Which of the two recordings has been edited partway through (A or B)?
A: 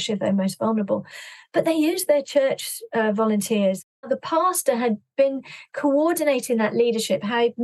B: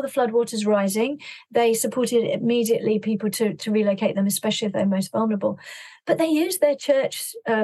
A